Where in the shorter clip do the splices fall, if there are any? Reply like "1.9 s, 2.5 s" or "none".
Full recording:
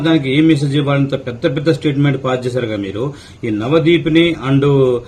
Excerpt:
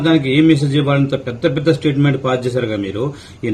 none